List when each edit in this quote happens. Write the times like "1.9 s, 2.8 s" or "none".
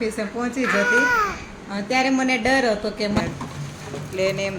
3.2 s